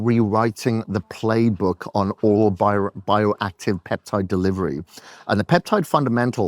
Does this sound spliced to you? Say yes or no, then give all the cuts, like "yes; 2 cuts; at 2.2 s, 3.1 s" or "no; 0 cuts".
no; 0 cuts